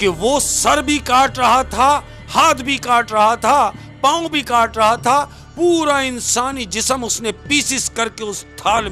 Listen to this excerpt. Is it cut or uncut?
uncut